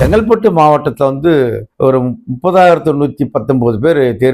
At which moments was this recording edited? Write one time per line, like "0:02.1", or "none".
none